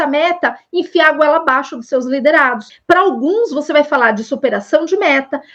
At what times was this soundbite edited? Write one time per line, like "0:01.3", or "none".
0:02.7

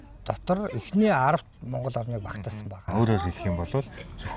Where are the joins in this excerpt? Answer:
0:02.9

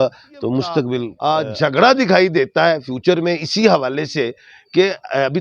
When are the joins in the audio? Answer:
0:01.1

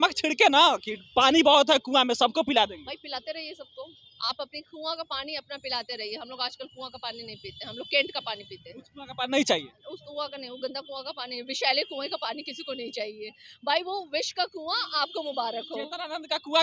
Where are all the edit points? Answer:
none

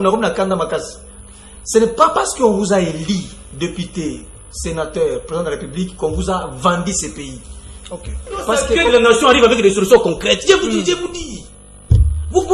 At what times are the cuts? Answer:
0:08.8

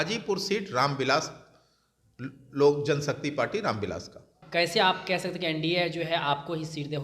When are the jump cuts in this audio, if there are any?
0:04.4

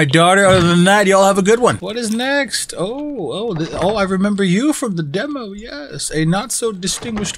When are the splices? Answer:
0:01.8

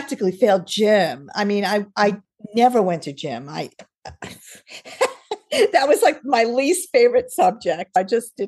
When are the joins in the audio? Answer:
none

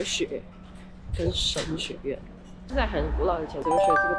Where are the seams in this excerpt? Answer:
0:02.7

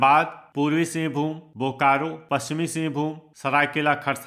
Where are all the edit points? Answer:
0:02.2

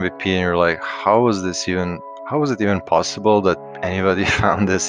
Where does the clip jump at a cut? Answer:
none

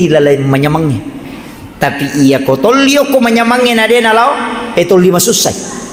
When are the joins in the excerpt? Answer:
none

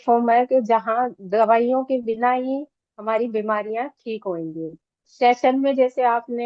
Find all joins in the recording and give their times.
0:05.1

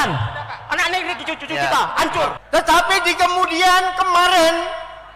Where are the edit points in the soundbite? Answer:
0:02.4

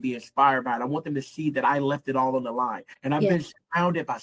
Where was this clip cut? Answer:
0:02.9

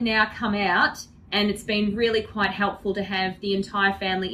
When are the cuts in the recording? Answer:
none

